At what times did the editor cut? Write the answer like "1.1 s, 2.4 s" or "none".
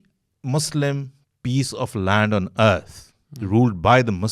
none